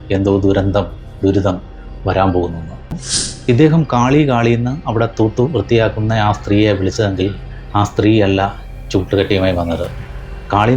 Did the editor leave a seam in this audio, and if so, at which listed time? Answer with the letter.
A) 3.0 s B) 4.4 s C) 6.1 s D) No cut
A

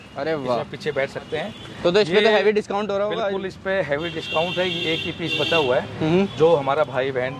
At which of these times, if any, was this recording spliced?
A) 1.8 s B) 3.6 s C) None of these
C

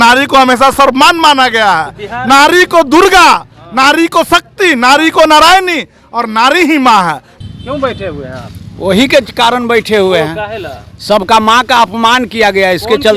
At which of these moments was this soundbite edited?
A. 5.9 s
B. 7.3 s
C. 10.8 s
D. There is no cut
B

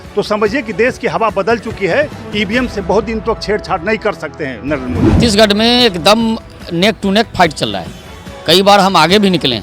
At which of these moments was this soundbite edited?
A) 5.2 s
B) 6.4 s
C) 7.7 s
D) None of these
A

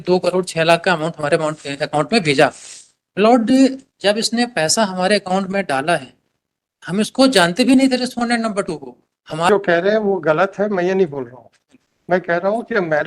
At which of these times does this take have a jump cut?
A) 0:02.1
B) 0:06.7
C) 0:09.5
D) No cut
C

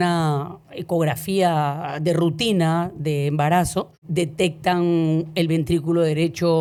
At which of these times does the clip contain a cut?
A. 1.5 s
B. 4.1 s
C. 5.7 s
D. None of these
D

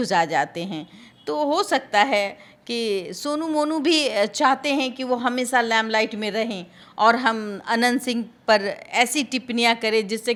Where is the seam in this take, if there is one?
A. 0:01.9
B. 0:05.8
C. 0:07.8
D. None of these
D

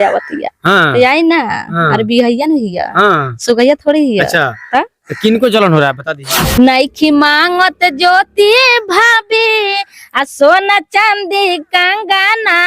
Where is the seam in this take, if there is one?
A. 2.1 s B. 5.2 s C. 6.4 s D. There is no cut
C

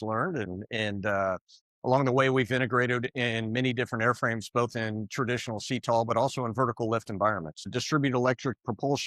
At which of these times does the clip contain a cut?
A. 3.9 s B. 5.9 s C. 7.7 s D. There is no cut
C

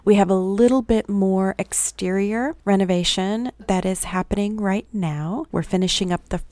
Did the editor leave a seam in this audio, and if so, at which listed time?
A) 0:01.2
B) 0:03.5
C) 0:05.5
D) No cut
C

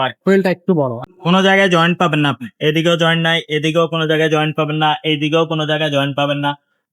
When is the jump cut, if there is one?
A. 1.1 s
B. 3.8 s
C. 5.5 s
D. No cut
A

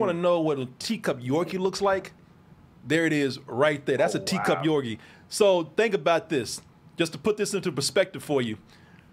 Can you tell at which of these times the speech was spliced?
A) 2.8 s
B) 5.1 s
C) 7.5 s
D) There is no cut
D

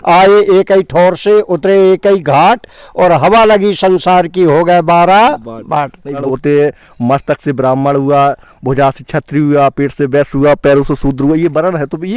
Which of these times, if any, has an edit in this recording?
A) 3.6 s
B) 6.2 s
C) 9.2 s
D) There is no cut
B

